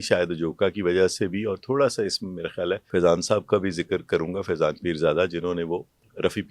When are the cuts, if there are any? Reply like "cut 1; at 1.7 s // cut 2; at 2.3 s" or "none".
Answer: cut 1; at 2.8 s